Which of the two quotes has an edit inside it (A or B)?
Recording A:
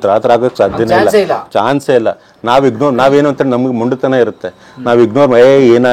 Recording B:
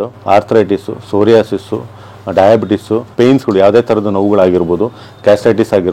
B